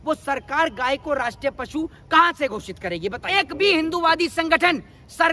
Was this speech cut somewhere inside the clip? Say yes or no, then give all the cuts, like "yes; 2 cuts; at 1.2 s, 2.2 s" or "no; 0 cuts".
yes; 1 cut; at 3.2 s